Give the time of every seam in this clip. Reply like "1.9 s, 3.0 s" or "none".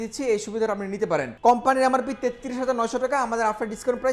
1.3 s